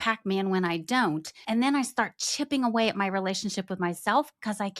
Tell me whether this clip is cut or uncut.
cut